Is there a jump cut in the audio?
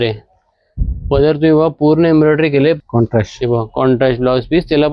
yes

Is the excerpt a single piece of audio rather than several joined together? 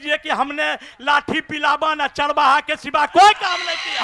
yes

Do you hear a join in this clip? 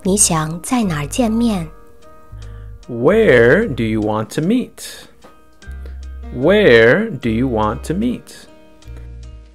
yes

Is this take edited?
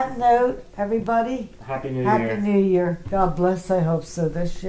yes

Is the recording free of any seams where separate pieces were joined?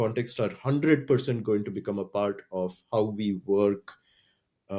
yes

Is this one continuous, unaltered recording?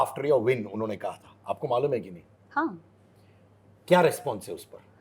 yes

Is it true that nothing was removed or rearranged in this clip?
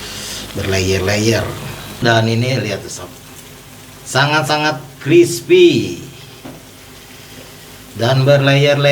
no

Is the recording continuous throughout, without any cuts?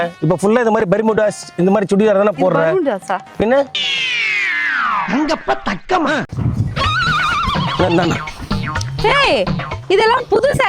no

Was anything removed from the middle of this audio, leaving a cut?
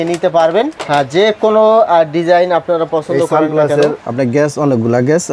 yes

